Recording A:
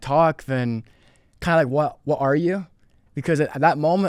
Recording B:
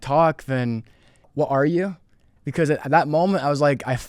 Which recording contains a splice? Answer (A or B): B